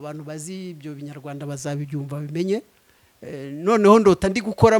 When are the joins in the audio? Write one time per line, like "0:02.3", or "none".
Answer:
none